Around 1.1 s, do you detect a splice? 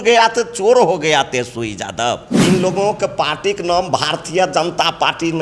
no; 1 cut; at 2.3 s

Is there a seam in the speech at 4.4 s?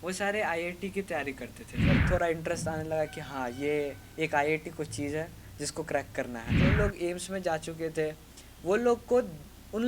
no; 2 cuts; at 2.0 s, 6.7 s

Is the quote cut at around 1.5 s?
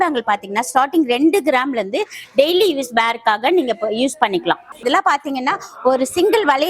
no; 1 cut; at 4.8 s

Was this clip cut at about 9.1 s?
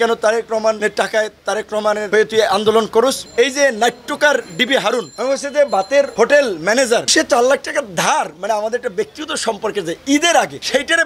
no; 2 cuts; at 3.2 s, 7.0 s

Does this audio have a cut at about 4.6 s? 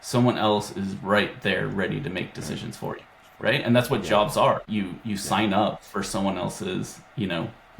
yes; 1 cut; at 4.6 s

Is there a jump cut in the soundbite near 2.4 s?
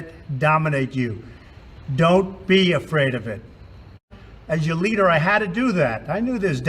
no; 1 cut; at 4.0 s

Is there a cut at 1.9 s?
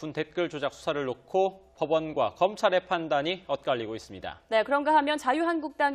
no; 0 cuts

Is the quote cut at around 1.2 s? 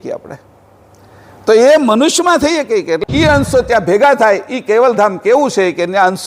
no; 1 cut; at 3.0 s

